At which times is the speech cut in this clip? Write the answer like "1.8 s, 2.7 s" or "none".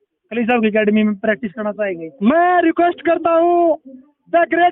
none